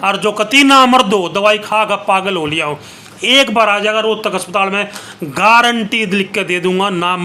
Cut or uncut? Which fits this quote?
uncut